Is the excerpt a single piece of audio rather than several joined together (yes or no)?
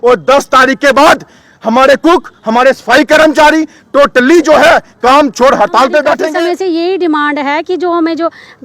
no